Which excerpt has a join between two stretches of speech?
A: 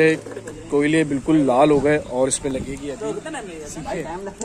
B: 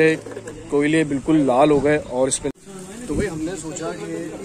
B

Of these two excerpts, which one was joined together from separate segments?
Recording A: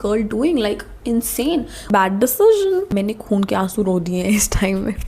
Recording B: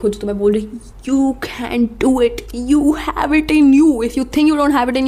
A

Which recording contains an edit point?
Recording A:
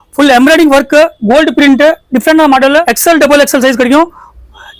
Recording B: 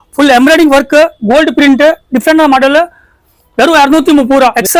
A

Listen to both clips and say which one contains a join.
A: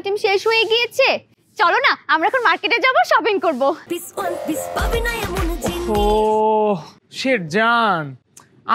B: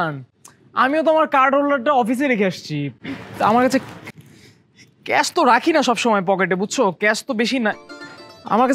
A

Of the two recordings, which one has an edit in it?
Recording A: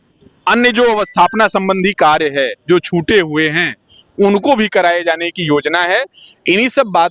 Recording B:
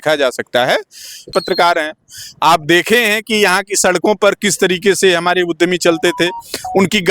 B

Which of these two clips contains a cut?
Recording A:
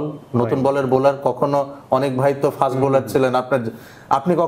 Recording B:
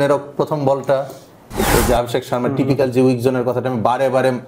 B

